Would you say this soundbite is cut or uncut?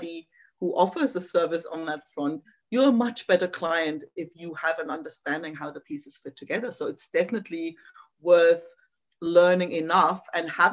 uncut